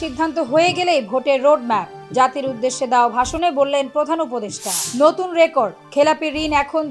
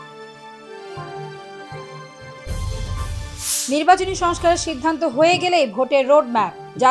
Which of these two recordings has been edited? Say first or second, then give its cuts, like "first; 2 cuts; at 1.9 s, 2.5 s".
second; 1 cut; at 3.4 s